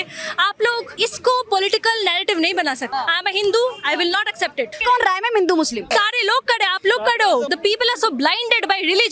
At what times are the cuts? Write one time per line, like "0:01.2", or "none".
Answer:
0:00.9
0:02.9
0:04.8
0:05.9
0:07.5